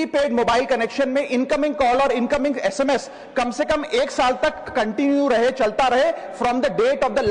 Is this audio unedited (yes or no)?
yes